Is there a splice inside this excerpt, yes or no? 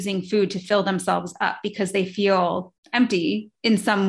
yes